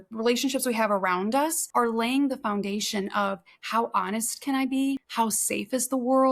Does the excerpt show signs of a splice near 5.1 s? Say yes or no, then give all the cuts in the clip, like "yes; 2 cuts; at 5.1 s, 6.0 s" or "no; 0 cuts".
yes; 2 cuts; at 1.6 s, 5.1 s